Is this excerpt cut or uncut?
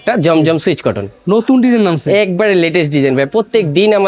uncut